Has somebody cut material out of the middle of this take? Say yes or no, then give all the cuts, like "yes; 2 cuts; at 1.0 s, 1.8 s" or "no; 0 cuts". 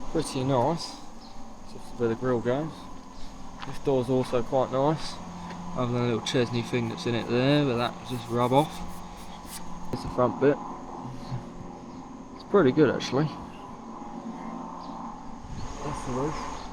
yes; 1 cut; at 9.9 s